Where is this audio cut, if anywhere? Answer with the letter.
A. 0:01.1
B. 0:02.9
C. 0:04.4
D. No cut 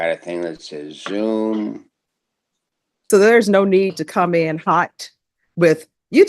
B